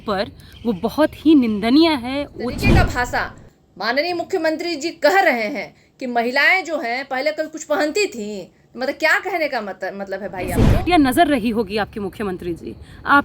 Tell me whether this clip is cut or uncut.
cut